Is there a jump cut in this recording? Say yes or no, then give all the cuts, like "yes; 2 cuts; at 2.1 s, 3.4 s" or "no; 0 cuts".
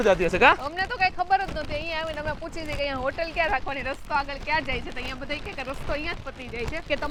no; 0 cuts